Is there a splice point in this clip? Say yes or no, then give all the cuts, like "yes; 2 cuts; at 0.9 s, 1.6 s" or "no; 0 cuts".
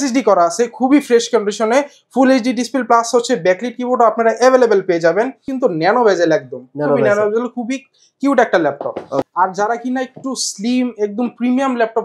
yes; 2 cuts; at 5.5 s, 9.3 s